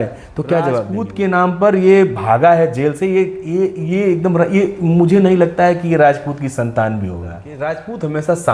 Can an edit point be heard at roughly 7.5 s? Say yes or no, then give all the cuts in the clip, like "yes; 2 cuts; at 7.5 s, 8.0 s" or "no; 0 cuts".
yes; 2 cuts; at 1.0 s, 7.5 s